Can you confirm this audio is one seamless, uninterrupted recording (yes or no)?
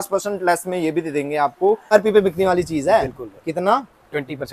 no